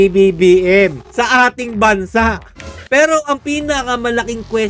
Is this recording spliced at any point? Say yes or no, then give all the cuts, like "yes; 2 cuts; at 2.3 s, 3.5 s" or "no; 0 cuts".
yes; 2 cuts; at 1.0 s, 2.8 s